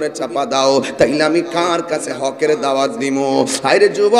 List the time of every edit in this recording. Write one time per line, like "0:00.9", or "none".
none